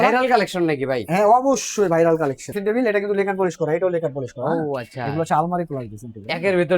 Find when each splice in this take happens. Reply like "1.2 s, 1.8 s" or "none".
2.5 s